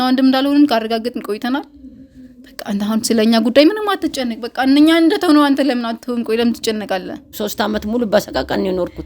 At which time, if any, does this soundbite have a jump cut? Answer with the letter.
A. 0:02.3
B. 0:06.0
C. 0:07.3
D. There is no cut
C